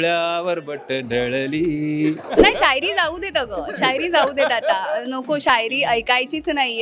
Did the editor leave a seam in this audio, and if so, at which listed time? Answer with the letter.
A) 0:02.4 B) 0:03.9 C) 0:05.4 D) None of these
A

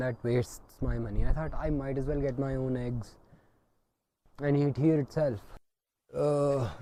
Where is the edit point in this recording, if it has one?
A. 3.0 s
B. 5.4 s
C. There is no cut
C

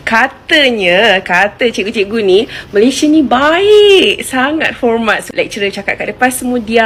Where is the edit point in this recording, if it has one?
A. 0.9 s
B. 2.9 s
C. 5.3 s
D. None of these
D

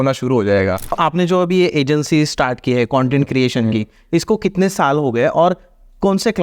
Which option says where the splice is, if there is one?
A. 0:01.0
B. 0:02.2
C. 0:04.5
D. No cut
A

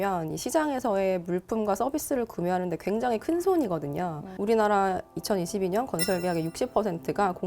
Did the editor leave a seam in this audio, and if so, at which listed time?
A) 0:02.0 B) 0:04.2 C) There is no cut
B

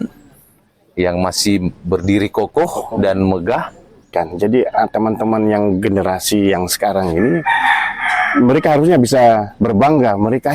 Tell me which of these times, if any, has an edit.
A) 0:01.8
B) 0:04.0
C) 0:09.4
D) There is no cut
B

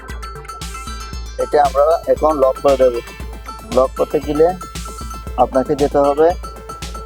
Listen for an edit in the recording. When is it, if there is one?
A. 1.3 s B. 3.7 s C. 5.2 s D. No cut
A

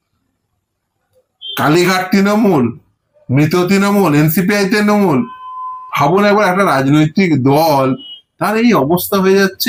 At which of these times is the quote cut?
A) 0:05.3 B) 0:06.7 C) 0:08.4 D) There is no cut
D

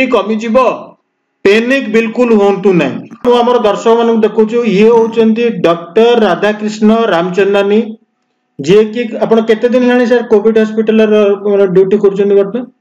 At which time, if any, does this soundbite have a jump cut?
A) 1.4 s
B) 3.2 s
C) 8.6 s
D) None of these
B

